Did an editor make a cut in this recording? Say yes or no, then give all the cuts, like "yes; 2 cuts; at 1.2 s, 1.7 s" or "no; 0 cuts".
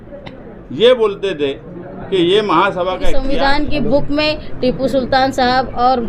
yes; 1 cut; at 3.2 s